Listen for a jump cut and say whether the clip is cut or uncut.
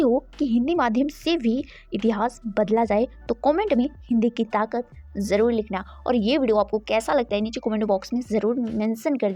uncut